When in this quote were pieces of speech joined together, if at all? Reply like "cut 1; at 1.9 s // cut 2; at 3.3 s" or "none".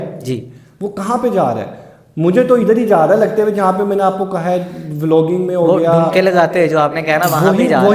none